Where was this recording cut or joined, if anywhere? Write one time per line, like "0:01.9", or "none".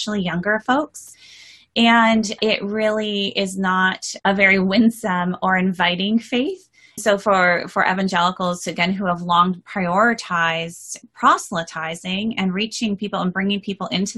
0:02.4
0:04.1
0:07.0
0:10.9